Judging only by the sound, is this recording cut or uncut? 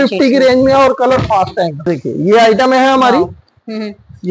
cut